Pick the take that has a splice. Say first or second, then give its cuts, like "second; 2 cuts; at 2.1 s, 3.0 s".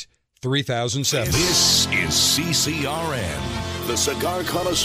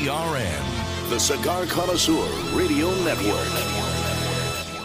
first; 1 cut; at 1.3 s